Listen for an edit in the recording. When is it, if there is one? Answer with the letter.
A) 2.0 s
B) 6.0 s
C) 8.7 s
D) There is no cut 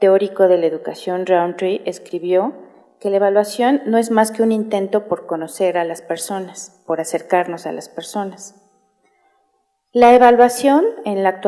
A